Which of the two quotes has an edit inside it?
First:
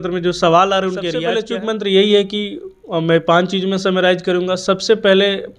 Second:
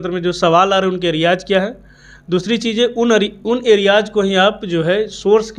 first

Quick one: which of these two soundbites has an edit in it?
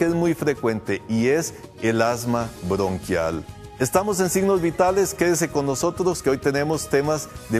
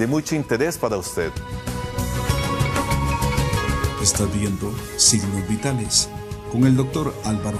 first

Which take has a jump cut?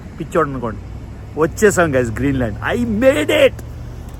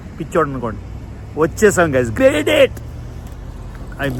second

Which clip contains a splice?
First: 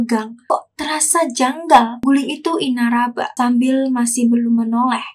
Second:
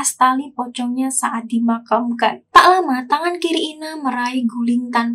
second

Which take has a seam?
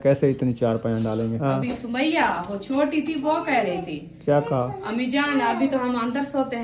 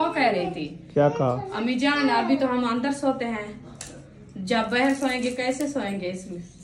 first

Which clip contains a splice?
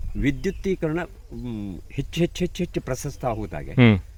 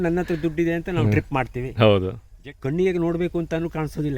second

